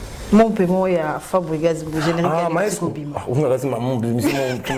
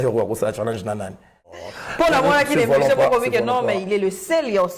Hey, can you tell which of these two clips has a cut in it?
second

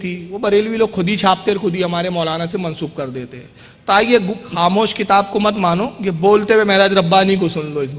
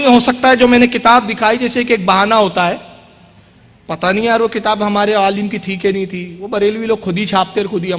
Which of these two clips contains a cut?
first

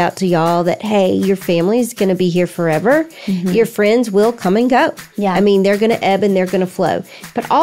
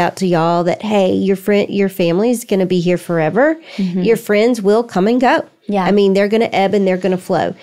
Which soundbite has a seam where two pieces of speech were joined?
first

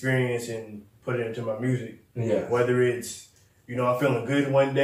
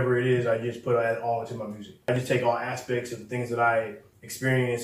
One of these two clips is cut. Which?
second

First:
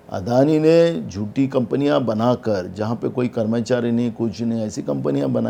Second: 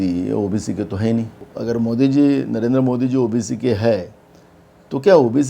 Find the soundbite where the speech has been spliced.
second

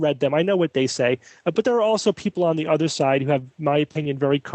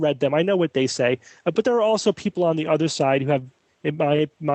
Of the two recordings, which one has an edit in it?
first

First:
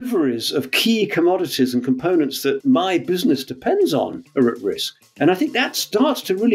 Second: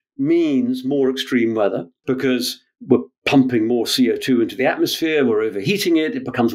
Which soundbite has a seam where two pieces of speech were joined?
first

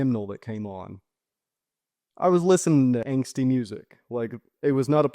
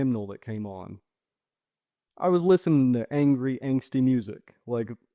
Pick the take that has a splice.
first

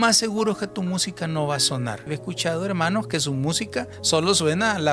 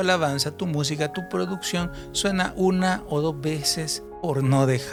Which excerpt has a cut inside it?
first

